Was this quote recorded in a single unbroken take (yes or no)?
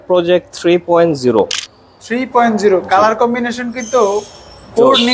yes